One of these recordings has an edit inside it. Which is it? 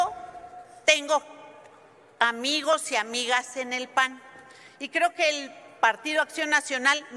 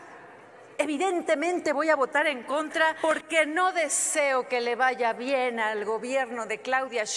second; 1 cut; at 3.0 s

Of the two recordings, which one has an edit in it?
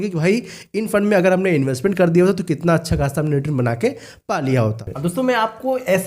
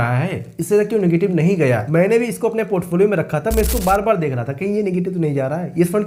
first; 1 cut; at 4.8 s

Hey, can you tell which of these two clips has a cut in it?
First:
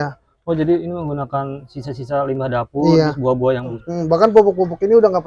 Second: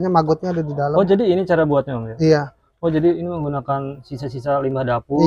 first; 1 cut; at 3.8 s

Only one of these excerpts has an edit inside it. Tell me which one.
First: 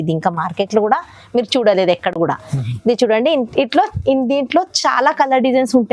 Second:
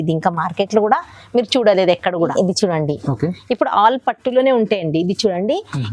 second; 1 cut; at 2.2 s

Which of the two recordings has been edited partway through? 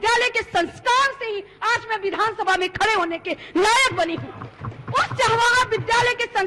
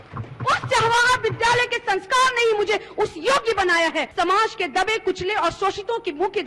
second; 1 cut; at 4.1 s

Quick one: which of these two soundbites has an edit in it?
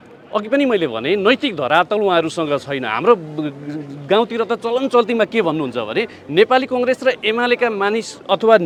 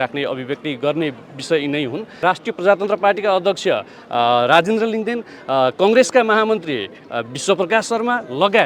second; 1 cut; at 2.2 s

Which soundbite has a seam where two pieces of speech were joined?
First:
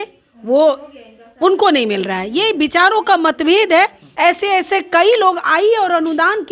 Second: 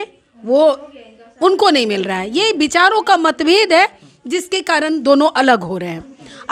first; 1 cut; at 4.0 s

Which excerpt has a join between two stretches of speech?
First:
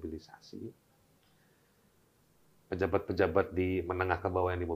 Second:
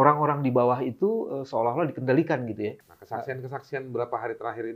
second; 1 cut; at 2.8 s

